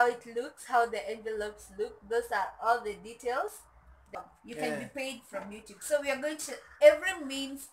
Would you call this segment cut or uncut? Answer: cut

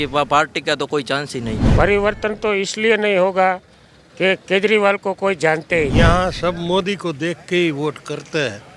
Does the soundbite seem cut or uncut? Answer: cut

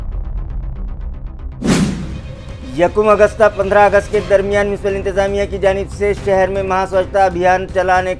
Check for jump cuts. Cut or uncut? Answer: cut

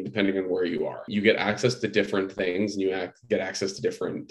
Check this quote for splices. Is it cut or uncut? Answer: cut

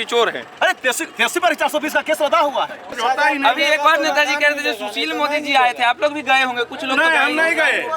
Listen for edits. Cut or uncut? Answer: cut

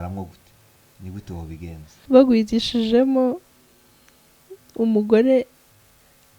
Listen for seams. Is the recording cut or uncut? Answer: cut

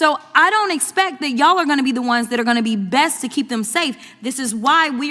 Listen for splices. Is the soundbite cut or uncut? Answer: uncut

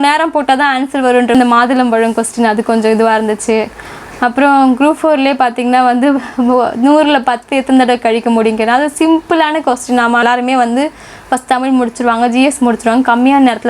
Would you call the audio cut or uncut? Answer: cut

